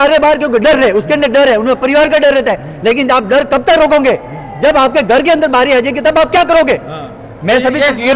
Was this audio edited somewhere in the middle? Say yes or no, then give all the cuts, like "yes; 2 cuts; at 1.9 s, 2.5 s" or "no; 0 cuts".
no; 0 cuts